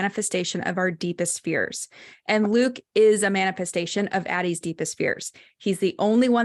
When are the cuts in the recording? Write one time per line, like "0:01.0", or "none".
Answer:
none